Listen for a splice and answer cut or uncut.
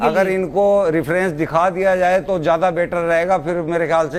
uncut